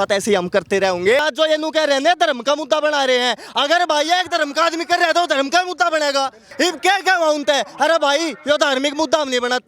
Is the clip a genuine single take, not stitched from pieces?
no; 2 cuts; at 1.2 s, 6.4 s

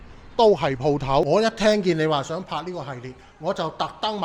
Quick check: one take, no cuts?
no; 1 cut; at 1.3 s

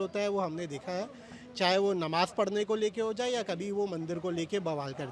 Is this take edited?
no; 0 cuts

